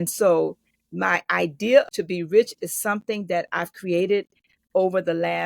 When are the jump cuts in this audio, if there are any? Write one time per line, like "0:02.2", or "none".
0:01.9